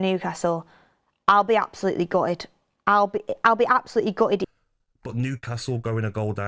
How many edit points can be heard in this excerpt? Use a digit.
1